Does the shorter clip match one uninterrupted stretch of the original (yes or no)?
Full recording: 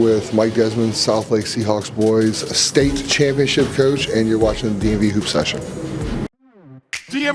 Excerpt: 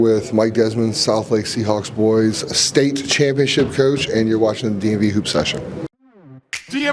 no